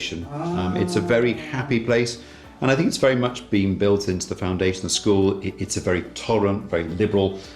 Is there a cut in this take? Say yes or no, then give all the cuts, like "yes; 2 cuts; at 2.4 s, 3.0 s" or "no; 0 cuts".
no; 0 cuts